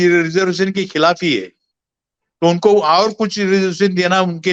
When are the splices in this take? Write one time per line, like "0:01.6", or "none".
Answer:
none